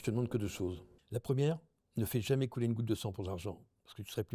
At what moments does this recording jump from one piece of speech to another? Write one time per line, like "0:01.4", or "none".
0:00.9